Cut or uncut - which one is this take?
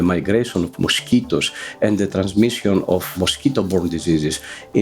cut